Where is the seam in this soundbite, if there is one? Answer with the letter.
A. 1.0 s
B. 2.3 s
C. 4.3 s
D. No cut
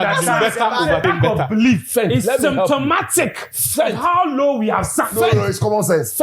A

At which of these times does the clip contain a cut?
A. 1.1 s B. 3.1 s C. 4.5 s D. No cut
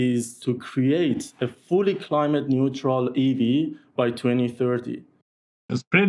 D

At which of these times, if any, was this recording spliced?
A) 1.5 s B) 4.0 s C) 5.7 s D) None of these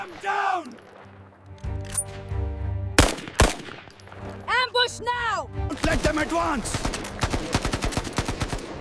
C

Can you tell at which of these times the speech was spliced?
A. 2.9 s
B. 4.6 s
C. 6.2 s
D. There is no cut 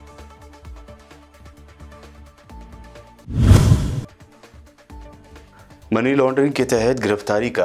A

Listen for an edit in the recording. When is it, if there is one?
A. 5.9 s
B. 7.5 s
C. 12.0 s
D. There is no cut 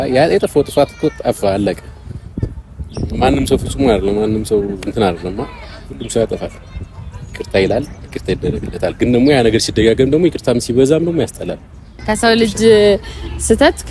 C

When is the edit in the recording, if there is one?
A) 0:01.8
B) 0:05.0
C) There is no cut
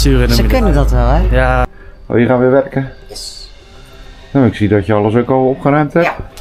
A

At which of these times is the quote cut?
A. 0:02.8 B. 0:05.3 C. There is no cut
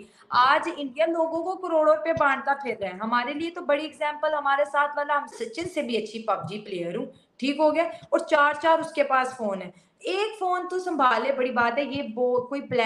B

